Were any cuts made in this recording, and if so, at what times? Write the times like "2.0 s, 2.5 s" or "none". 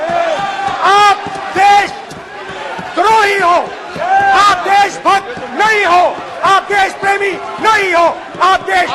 none